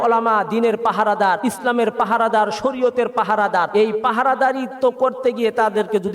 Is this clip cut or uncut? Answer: cut